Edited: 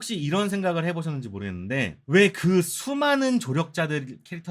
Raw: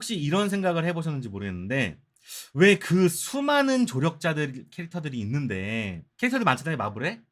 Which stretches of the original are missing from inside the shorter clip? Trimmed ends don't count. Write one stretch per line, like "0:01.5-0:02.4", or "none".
0:02.0-0:02.4